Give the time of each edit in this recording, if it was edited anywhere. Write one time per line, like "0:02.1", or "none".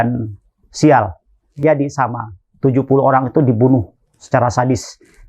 0:01.6